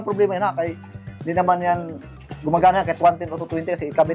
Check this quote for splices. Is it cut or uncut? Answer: uncut